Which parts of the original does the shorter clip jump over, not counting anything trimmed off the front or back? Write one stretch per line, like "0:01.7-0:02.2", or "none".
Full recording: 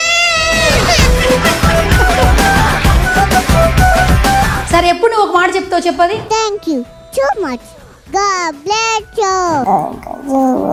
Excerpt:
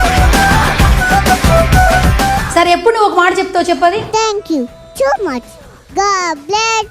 0:04.5-0:04.6